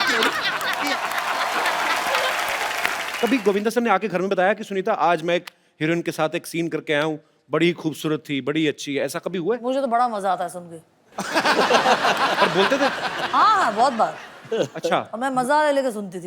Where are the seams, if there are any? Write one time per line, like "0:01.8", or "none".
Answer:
0:03.0